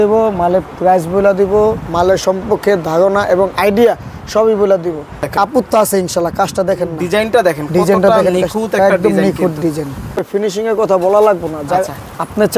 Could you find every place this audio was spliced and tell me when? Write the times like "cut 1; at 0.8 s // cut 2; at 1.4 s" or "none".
cut 1; at 5.2 s // cut 2; at 10.2 s